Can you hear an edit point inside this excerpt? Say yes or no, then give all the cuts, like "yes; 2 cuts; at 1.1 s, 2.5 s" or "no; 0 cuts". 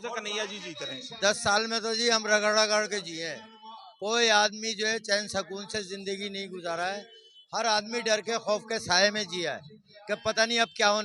yes; 1 cut; at 1.0 s